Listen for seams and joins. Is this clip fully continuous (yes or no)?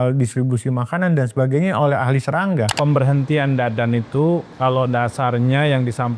no